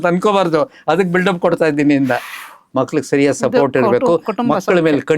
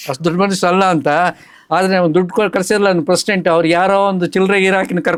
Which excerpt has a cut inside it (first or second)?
first